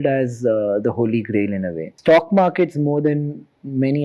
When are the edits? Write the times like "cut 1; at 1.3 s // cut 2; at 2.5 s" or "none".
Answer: cut 1; at 1.9 s